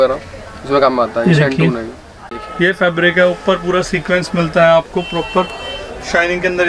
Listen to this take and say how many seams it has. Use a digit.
1